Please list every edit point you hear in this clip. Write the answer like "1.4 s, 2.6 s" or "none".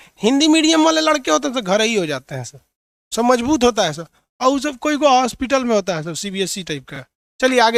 none